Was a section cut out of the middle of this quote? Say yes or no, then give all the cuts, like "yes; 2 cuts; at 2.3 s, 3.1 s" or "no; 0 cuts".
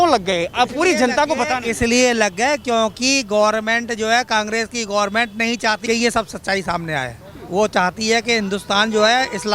no; 0 cuts